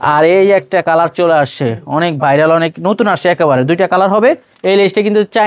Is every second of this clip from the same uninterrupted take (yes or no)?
no